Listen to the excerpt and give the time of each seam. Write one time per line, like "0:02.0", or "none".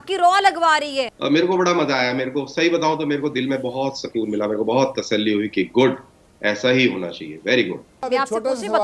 0:01.1
0:08.0